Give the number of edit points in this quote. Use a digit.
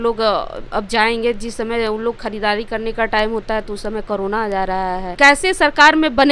1